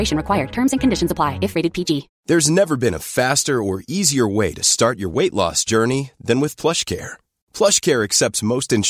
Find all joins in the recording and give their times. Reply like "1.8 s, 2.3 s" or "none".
2.1 s